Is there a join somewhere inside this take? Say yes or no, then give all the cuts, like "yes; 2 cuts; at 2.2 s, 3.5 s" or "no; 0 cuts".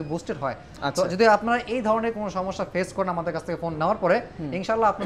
no; 0 cuts